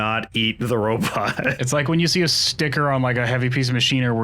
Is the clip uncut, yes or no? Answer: no